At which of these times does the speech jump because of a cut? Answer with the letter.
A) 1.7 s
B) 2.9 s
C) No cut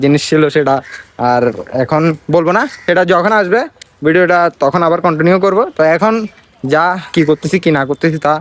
C